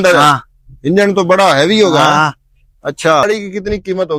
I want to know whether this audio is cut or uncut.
cut